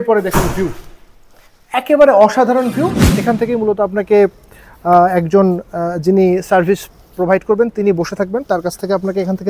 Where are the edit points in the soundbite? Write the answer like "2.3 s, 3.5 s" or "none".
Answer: 3.1 s